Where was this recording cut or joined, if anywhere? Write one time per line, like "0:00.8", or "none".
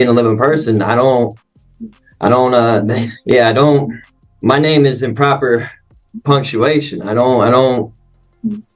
none